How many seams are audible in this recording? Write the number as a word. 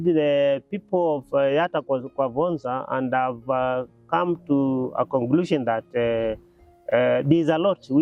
zero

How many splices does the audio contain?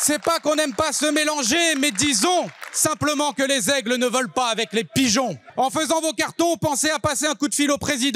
one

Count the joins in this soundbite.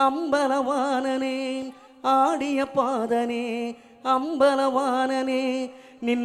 zero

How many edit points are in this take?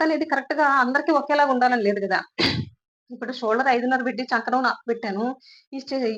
zero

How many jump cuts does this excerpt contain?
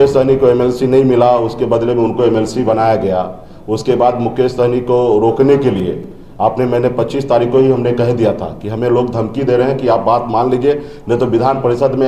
zero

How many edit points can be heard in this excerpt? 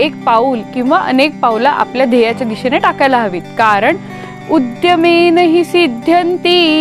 one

